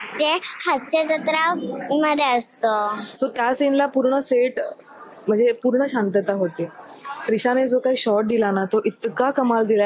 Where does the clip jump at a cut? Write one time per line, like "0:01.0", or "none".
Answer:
0:03.0